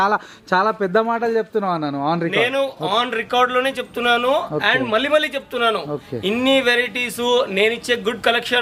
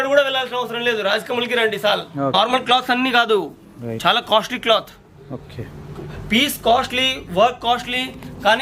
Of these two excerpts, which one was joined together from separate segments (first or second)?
second